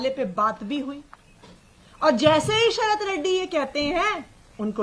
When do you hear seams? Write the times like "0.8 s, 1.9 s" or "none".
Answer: none

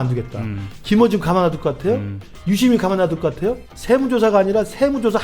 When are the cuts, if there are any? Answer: 3.7 s

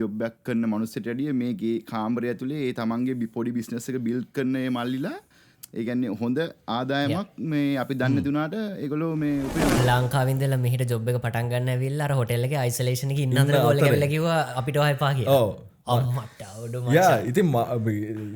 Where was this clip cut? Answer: 9.8 s

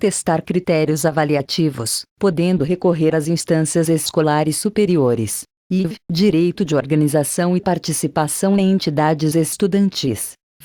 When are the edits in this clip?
none

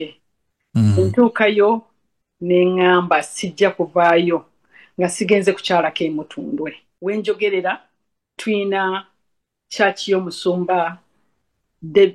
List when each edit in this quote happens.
6.9 s

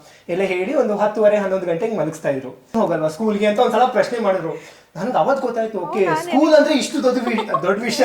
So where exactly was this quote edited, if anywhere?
2.7 s

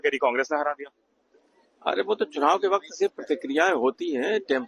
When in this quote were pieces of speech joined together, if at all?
2.7 s

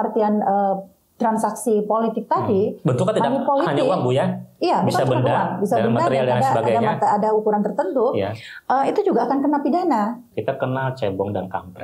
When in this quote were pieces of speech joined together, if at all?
10.3 s

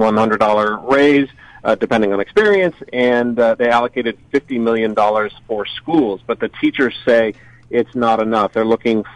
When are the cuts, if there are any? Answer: none

